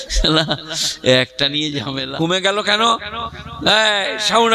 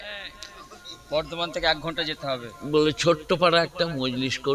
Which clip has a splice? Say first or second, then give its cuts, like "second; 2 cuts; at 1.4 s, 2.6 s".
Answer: first; 1 cut; at 1.9 s